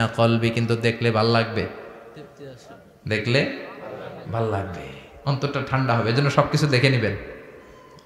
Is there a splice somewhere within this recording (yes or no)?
no